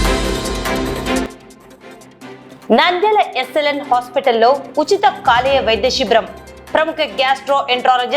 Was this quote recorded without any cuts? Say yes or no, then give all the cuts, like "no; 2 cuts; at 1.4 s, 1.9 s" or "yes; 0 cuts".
no; 1 cut; at 1.2 s